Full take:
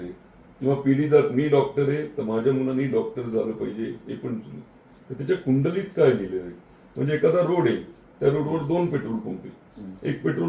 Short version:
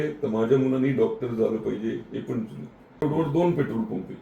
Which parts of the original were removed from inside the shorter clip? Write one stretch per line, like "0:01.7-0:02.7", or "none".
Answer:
0:05.0-0:08.4